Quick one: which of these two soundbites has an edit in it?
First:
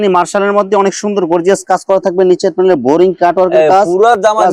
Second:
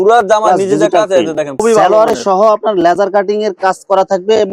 second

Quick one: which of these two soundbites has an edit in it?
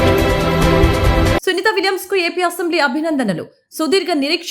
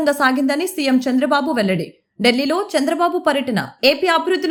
first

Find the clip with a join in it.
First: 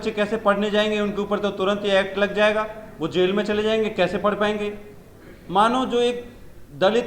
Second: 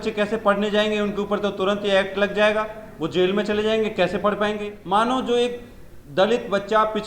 second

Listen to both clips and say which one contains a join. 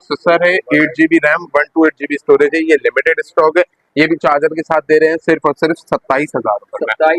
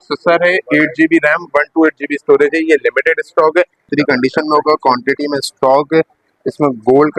second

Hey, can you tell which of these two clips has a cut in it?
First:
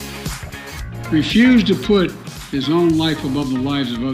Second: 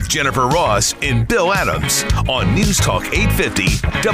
first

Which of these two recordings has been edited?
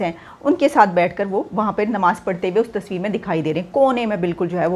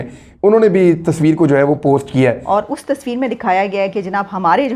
second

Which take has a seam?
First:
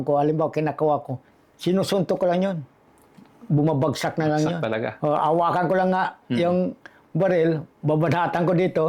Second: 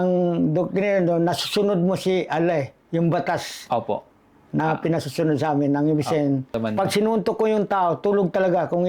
second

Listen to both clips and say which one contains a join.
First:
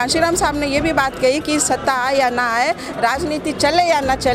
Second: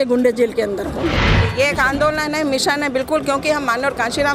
second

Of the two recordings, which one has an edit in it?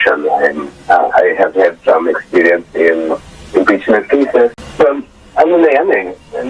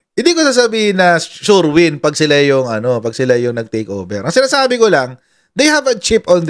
first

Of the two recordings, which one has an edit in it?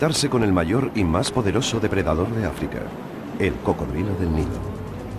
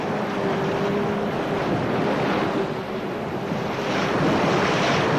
first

